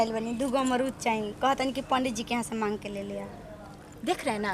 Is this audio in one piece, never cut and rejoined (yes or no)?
yes